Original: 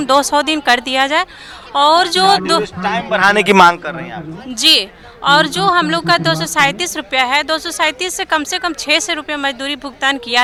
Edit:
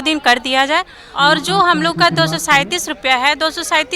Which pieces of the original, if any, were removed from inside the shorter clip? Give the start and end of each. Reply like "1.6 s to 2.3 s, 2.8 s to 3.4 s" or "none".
1.4 s to 5.1 s